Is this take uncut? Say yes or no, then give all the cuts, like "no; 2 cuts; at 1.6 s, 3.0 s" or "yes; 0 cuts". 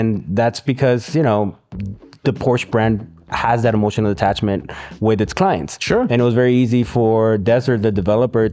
yes; 0 cuts